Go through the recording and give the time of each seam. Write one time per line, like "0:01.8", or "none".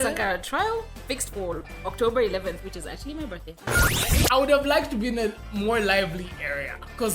0:03.7